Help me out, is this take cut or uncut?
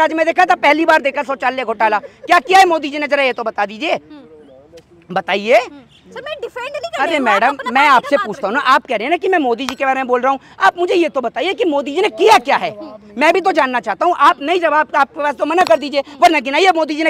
uncut